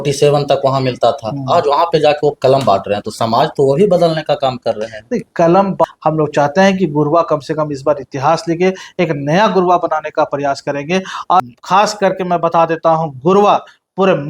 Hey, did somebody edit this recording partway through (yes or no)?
yes